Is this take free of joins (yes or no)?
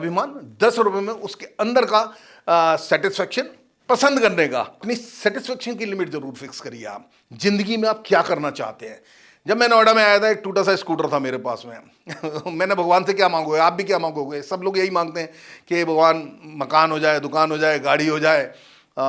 no